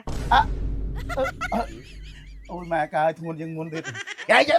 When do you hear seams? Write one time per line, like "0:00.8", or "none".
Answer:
none